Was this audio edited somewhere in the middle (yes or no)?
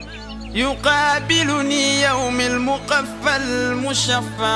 no